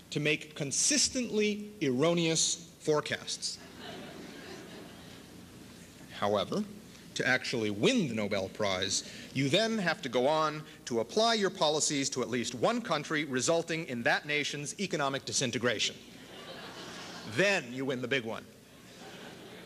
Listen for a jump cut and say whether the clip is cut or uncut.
uncut